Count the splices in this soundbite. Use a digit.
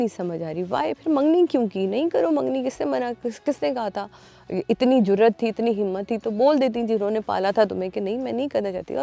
0